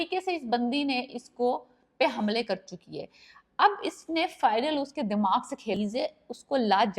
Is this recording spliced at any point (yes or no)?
yes